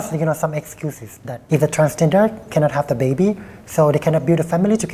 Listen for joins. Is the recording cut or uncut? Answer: cut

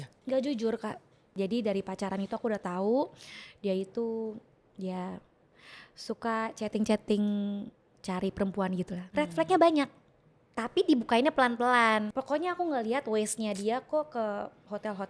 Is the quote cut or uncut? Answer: cut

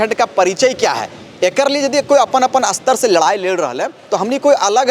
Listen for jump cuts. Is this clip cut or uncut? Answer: uncut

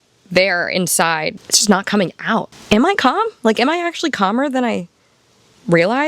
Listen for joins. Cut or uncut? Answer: cut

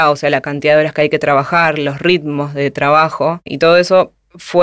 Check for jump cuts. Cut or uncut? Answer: cut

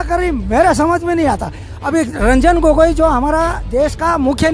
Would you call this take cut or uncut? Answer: cut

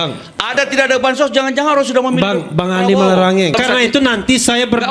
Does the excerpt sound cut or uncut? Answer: cut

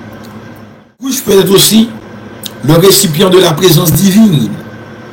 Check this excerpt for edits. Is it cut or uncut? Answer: cut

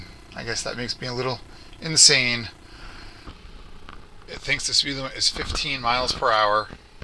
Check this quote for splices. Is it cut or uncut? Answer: cut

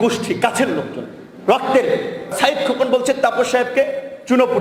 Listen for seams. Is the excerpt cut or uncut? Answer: cut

